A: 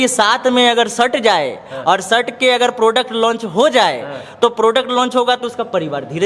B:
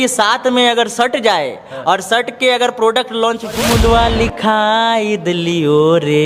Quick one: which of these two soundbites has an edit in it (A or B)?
B